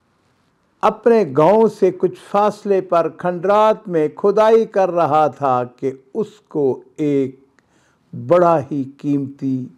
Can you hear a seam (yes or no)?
no